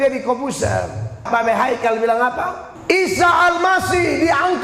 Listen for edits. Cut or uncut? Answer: cut